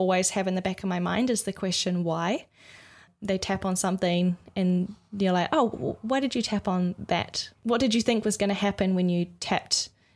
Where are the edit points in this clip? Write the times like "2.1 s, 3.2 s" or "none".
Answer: 3.1 s, 7.5 s